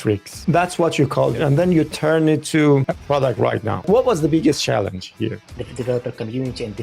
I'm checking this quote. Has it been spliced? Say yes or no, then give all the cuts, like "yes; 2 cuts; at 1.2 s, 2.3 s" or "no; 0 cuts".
yes; 3 cuts; at 1.4 s, 3.2 s, 5.4 s